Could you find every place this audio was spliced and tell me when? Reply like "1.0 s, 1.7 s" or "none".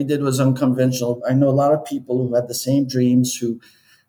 1.2 s